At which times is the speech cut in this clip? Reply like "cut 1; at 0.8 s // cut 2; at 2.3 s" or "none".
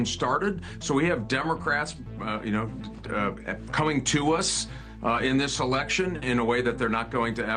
none